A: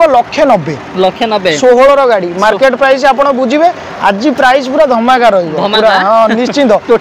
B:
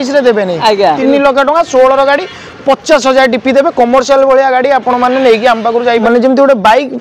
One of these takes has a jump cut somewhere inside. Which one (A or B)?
B